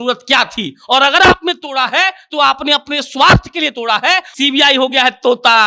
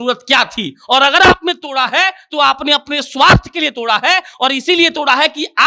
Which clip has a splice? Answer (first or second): first